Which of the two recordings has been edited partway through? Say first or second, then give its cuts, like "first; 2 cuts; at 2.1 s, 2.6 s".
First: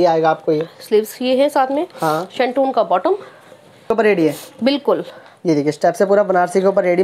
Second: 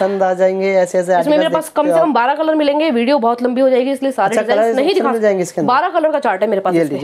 first; 1 cut; at 3.9 s